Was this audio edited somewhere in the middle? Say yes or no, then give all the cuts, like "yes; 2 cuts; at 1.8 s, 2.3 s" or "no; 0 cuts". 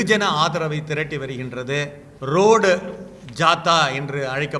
yes; 1 cut; at 2.1 s